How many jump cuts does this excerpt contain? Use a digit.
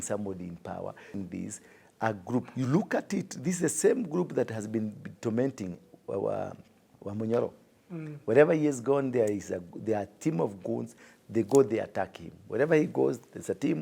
2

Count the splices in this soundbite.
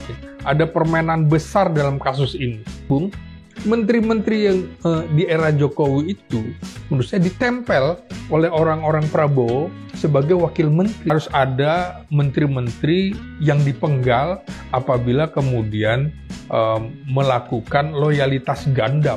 2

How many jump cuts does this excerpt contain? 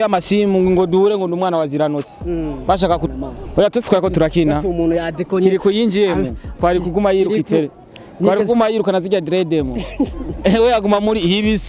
1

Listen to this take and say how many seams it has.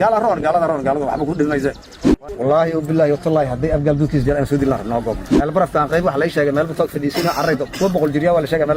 2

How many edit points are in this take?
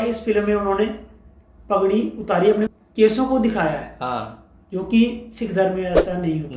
1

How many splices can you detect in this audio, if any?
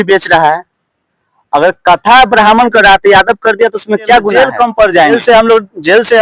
1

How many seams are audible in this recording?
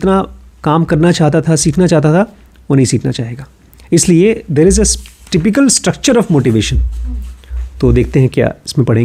0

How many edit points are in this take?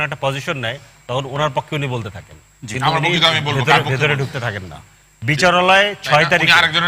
0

